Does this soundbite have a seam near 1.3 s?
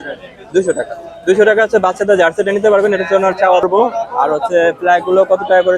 no; 1 cut; at 3.6 s

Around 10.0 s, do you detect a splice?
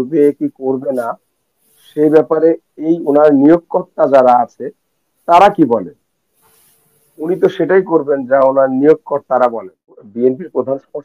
yes; 1 cut; at 10.0 s

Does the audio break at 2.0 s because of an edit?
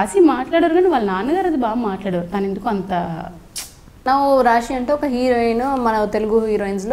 no; 1 cut; at 4.0 s

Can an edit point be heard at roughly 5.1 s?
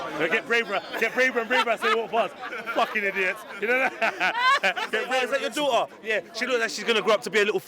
yes; 1 cut; at 5.1 s

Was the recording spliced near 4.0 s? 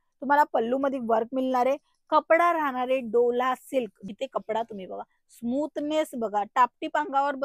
yes; 1 cut; at 4.0 s

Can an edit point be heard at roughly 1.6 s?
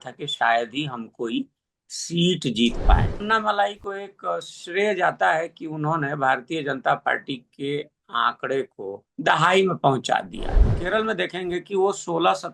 no; 3 cuts; at 3.2 s, 9.0 s, 10.8 s

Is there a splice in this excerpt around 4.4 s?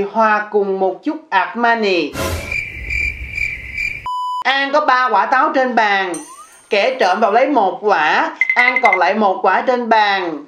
yes; 1 cut; at 4.4 s

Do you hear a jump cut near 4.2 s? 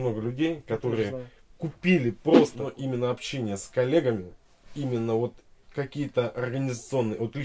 no; 1 cut; at 2.7 s

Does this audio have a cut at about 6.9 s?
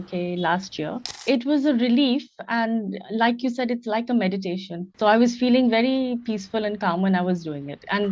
no; 1 cut; at 1.1 s

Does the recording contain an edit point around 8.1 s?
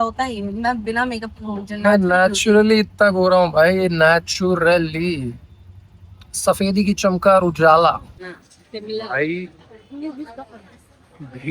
yes; 1 cut; at 8.1 s

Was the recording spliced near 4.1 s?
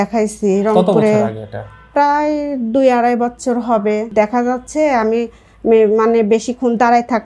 yes; 1 cut; at 4.1 s

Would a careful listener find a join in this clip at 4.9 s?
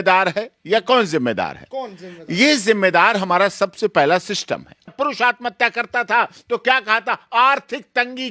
yes; 1 cut; at 4.9 s

